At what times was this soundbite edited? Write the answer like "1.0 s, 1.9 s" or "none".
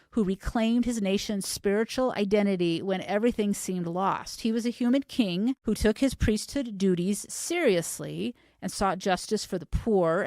5.6 s